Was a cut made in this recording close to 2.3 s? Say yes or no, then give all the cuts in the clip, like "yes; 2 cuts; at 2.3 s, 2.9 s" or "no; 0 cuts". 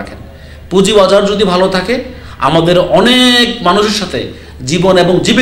no; 0 cuts